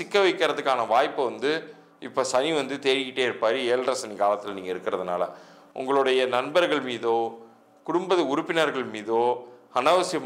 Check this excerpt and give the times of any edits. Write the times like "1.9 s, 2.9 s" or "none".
none